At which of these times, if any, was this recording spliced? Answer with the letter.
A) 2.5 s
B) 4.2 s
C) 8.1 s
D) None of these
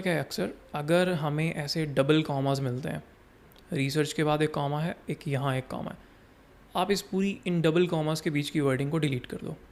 D